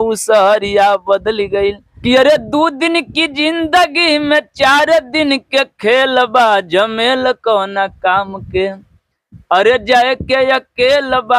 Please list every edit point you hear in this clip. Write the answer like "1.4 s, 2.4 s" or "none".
1.9 s